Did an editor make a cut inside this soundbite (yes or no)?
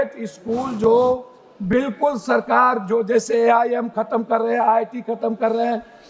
no